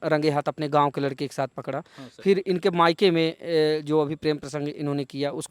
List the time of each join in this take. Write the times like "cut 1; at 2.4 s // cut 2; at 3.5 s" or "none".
none

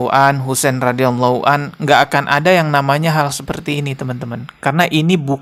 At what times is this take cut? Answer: none

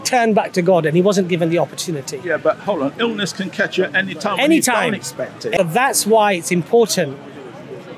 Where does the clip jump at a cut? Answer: cut 1; at 5.5 s

